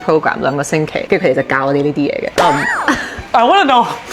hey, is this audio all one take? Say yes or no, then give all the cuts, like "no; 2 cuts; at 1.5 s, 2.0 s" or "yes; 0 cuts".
no; 1 cut; at 1.0 s